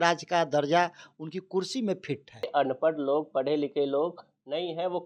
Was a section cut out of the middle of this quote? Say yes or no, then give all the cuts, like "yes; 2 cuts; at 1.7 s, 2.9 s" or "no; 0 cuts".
yes; 1 cut; at 2.5 s